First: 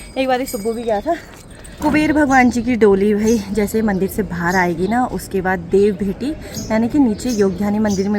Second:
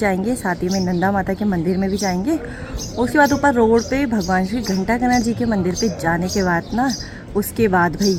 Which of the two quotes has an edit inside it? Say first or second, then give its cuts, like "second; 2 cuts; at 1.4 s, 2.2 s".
first; 1 cut; at 1.8 s